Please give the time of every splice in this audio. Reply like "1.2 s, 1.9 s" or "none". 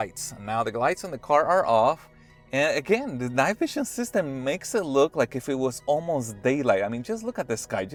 none